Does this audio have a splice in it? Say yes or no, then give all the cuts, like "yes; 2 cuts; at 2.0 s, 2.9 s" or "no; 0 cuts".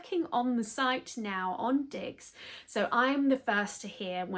no; 0 cuts